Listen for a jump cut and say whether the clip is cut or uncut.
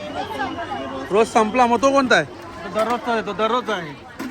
uncut